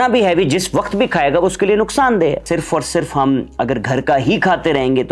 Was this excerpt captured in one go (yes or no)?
no